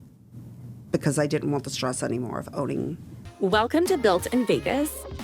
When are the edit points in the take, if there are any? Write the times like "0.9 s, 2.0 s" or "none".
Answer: 3.2 s